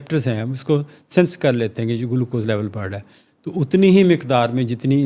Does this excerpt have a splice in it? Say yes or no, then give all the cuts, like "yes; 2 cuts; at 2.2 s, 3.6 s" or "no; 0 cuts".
no; 0 cuts